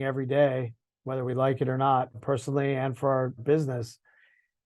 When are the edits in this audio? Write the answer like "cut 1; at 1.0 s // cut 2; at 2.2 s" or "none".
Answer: cut 1; at 2.1 s // cut 2; at 3.4 s